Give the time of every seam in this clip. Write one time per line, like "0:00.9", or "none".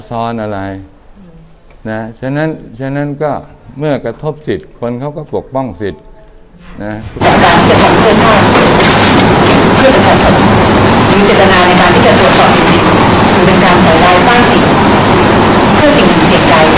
0:07.2